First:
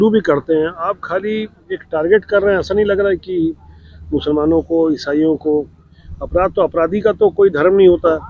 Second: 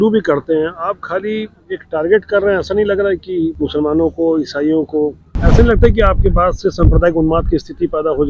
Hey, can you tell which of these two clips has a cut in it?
second; 2 cuts; at 3.5 s, 5.4 s

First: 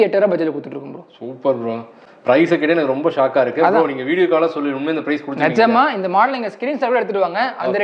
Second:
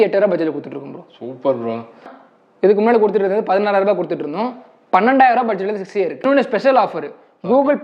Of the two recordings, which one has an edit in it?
second; 2 cuts; at 2.1 s, 6.2 s

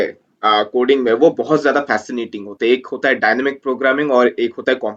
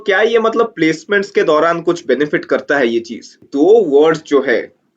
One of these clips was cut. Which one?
second; 1 cut; at 3.5 s

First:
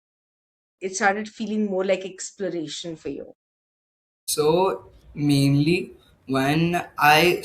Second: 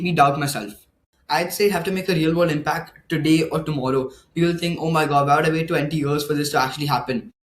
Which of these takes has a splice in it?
second; 1 cut; at 1.1 s

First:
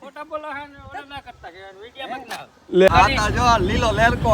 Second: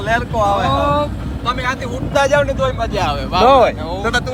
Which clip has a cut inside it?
first; 1 cut; at 2.9 s

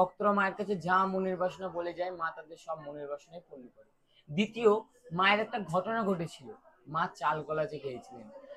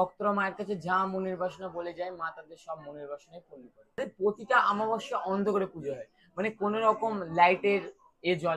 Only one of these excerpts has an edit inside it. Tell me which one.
second; 1 cut; at 4.0 s

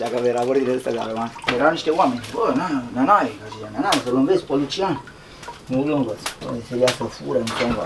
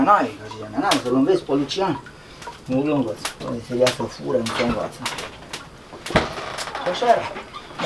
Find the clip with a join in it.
first; 1 cut; at 1.5 s

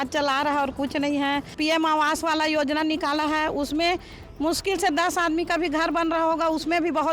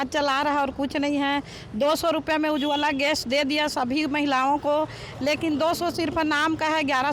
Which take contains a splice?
first; 1 cut; at 1.5 s

